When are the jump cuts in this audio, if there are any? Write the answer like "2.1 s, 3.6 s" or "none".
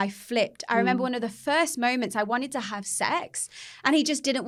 none